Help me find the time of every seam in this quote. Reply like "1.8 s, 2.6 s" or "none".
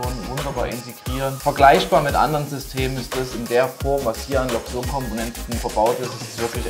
1.4 s, 5.6 s